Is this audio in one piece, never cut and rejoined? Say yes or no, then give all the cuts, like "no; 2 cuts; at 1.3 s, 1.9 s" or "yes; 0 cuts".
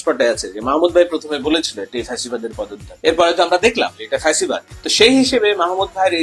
no; 2 cuts; at 2.8 s, 4.8 s